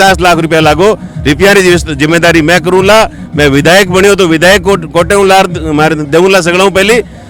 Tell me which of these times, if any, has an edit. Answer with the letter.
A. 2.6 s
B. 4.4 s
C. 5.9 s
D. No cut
D